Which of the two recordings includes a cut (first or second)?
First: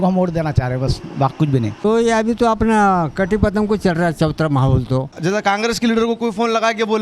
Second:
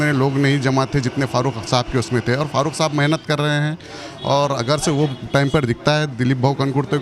first